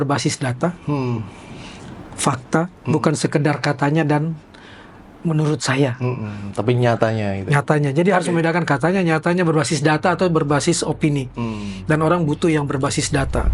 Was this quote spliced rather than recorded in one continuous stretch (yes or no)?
no